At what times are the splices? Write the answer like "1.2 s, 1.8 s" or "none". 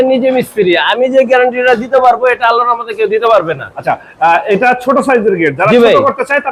none